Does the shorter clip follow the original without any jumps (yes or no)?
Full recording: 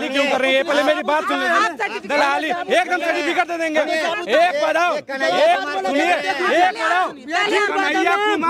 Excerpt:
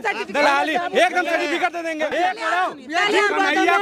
no